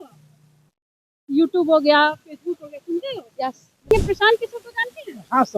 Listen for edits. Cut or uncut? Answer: cut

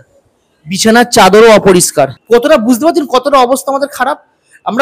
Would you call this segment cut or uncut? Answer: cut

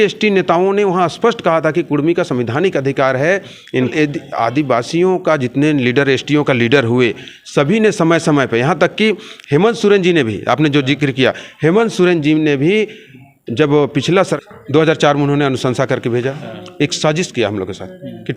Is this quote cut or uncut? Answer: cut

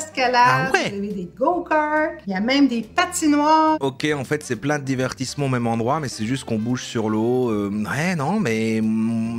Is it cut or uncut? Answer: cut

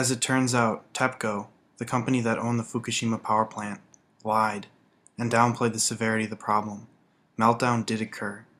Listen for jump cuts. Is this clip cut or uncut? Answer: uncut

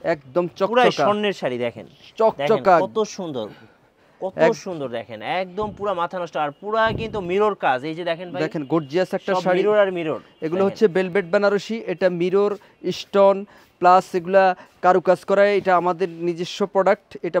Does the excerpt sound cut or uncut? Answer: uncut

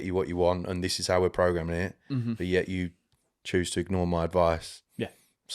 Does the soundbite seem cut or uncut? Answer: uncut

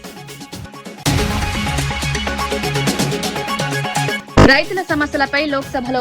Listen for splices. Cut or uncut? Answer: cut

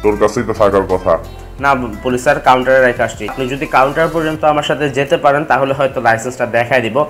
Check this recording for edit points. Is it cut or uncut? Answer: cut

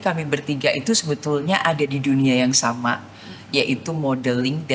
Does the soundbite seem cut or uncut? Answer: uncut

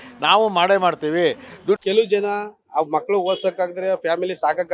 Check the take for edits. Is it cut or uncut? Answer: cut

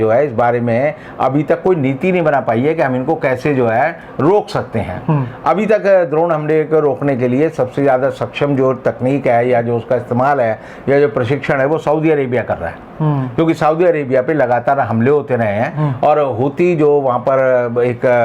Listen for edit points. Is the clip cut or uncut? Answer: uncut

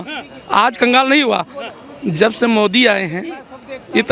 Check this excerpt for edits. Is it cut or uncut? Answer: uncut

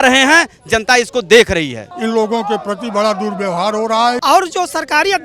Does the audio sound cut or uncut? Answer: cut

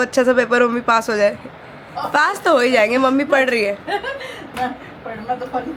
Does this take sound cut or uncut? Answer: uncut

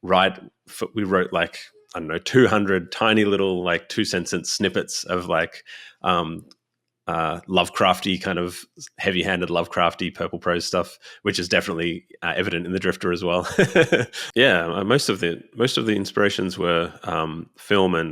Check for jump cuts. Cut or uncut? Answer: cut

